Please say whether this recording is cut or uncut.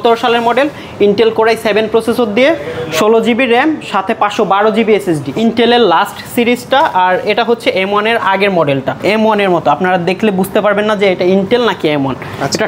cut